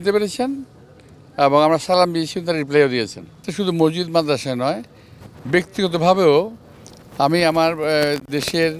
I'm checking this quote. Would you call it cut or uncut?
cut